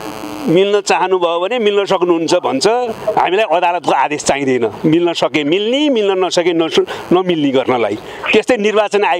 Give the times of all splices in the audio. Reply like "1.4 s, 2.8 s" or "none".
none